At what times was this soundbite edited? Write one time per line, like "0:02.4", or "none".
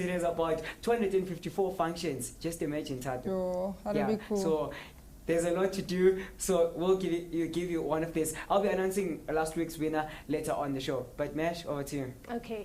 0:06.3